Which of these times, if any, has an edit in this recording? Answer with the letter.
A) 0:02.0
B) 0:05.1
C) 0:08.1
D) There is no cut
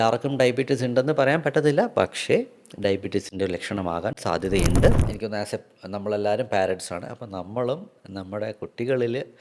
B